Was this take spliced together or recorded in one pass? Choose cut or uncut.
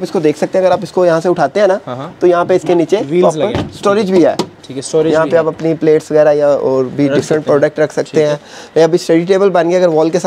uncut